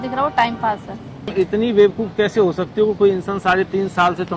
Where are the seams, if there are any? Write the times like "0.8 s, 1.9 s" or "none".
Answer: 1.3 s